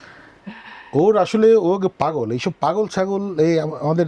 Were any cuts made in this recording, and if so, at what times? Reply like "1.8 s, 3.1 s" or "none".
none